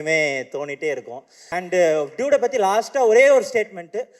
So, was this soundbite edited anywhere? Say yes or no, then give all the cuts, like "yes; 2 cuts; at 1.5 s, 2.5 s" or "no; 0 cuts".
yes; 1 cut; at 1.5 s